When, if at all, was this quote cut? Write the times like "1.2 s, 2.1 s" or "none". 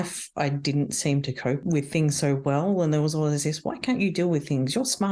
1.6 s